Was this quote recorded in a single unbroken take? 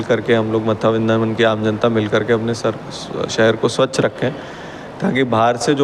yes; 0 cuts

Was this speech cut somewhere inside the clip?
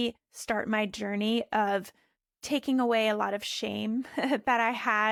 no; 0 cuts

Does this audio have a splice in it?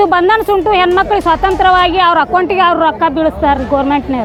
no; 0 cuts

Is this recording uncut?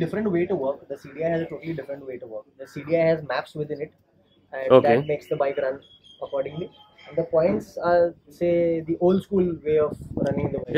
yes; 0 cuts

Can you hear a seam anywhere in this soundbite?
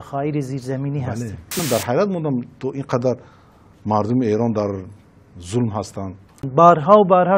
yes; 2 cuts; at 1.6 s, 6.4 s

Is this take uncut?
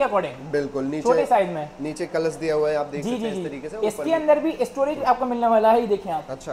yes; 0 cuts

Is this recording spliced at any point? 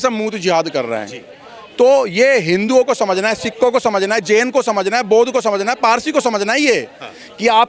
no; 0 cuts

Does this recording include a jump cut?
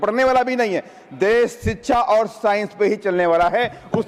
no; 0 cuts

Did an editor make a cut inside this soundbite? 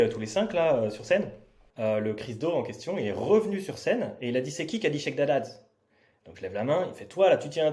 no; 0 cuts

